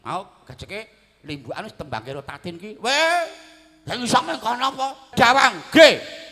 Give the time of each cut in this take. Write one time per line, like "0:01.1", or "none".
0:05.1